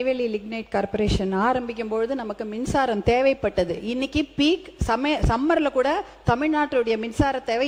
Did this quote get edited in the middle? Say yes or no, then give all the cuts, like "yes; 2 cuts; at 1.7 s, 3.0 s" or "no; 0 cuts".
no; 0 cuts